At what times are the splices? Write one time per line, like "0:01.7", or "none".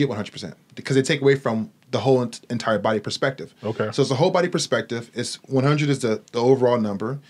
none